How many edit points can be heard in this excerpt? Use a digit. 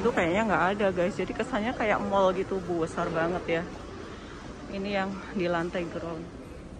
0